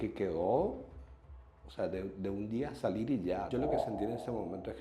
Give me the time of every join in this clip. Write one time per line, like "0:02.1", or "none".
0:03.5